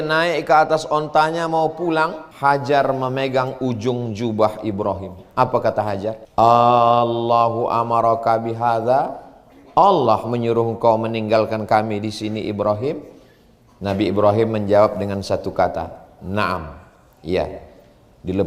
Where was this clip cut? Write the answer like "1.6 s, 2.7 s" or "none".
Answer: 2.2 s, 6.2 s